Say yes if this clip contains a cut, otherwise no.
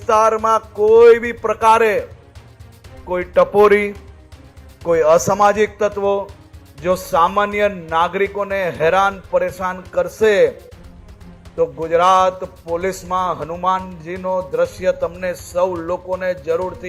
no